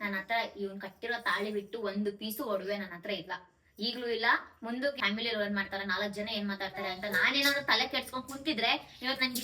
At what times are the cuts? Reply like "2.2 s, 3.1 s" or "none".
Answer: 5.0 s